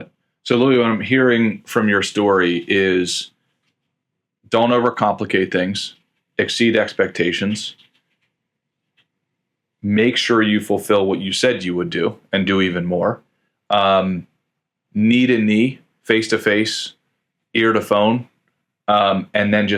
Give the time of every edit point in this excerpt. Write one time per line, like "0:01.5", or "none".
none